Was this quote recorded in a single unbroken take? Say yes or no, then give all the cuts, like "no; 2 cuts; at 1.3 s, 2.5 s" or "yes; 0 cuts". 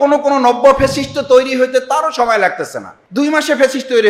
yes; 0 cuts